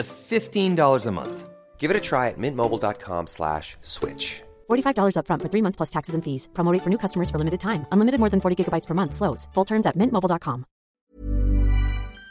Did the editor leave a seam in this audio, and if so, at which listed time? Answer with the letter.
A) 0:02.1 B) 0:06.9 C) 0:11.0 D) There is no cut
C